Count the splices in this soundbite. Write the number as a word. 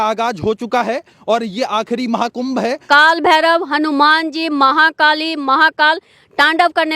one